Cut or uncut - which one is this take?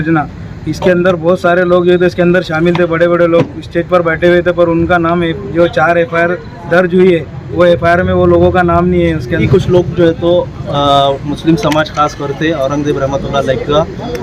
cut